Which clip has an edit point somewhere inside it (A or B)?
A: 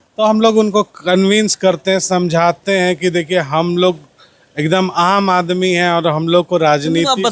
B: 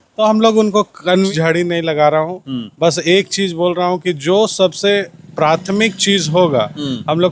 B